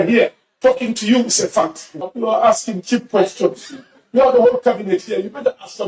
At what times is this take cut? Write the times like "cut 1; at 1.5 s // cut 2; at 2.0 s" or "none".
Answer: cut 1; at 1.8 s